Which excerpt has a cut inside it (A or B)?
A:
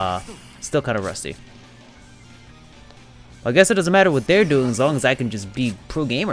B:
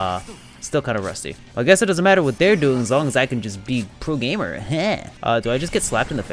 B